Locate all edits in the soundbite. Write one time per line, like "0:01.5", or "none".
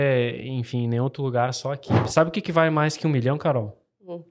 0:02.0

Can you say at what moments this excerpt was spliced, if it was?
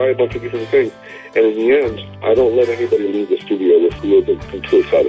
0:04.0

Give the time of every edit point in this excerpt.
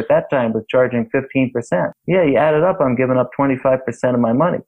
0:01.9

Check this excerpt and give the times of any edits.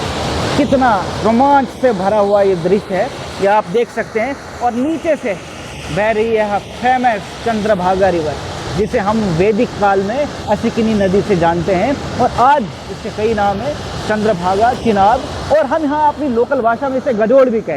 none

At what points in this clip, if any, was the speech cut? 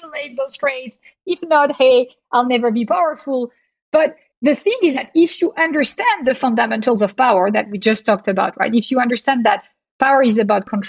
0:04.3

